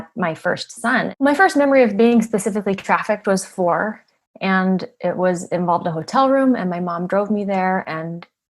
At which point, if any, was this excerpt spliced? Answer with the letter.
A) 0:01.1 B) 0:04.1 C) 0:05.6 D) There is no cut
A